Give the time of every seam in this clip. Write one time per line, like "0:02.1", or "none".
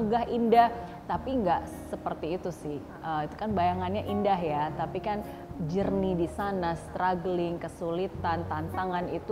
none